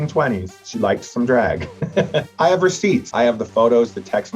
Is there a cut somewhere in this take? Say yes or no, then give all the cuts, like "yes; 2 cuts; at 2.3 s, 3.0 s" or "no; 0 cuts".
yes; 2 cuts; at 2.3 s, 3.1 s